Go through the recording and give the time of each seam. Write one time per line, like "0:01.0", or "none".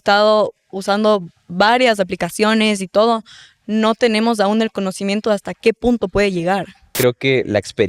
0:06.9